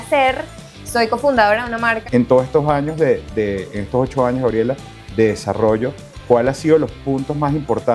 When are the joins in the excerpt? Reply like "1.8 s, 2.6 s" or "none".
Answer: 2.0 s